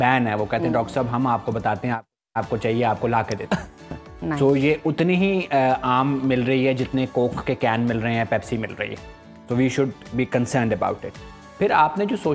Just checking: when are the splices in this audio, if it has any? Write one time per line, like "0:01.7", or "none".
none